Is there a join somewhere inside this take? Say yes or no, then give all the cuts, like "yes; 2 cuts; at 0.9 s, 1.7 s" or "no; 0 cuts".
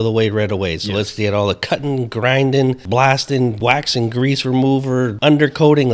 yes; 3 cuts; at 2.8 s, 3.6 s, 5.1 s